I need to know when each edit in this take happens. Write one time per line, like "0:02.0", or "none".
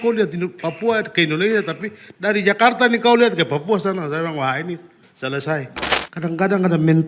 0:05.8